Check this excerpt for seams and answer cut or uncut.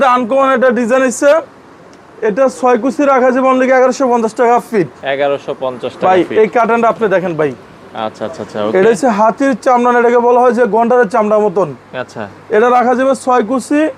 uncut